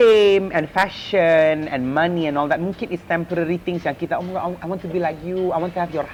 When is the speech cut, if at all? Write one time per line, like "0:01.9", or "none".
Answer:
none